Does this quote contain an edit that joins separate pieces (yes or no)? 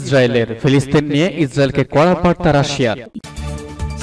yes